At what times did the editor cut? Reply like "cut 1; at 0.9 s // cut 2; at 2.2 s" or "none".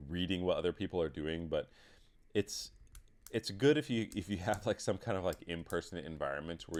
none